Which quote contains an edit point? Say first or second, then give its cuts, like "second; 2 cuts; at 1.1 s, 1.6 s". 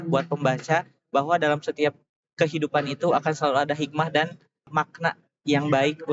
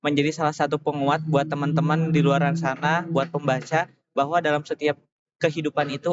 first; 1 cut; at 4.7 s